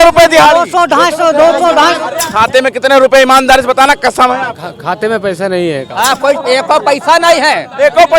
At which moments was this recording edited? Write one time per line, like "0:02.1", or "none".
0:02.1
0:05.9